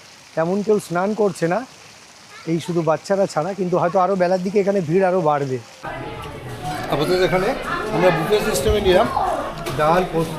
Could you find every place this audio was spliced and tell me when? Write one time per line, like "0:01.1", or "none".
0:05.8